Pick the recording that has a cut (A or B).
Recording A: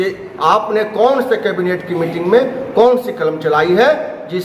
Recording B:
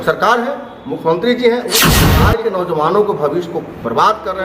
B